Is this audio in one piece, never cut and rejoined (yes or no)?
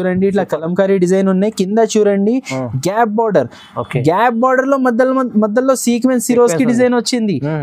yes